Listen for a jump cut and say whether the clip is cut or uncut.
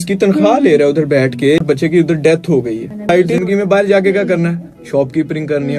cut